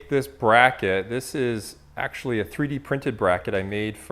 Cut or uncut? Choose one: uncut